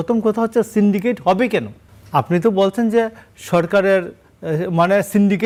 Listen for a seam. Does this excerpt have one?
no; 0 cuts

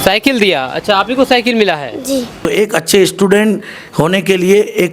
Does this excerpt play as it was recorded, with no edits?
no; 1 cut; at 2.4 s

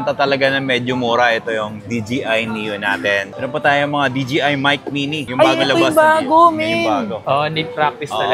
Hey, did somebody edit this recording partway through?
yes; 2 cuts; at 3.3 s, 7.2 s

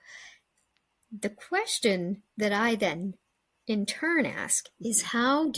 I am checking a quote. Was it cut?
no; 0 cuts

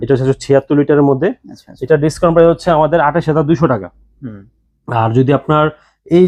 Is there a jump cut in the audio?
no; 0 cuts

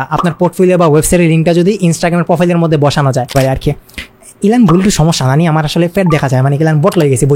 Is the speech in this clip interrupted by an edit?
yes; 1 cut; at 3.4 s

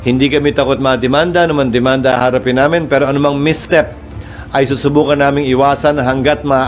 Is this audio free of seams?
yes; 0 cuts

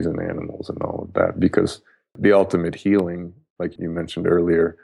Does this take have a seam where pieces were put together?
yes; 2 cuts; at 2.2 s, 3.7 s

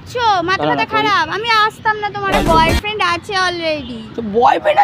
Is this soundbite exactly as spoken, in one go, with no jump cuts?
no; 1 cut; at 2.3 s

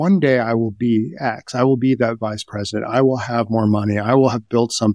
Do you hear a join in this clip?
no; 0 cuts

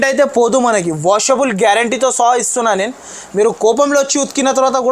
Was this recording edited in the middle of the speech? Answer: no; 0 cuts

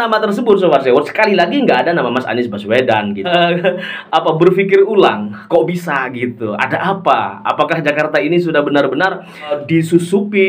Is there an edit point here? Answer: yes; 2 cuts; at 3.3 s, 9.6 s

